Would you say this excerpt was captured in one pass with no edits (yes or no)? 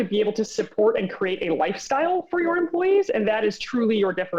yes